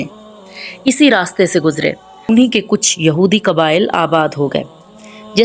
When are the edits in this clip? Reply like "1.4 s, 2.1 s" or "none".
2.2 s